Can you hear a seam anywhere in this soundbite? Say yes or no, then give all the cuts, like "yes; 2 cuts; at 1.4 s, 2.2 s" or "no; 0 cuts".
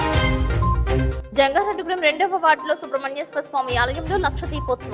yes; 1 cut; at 0.9 s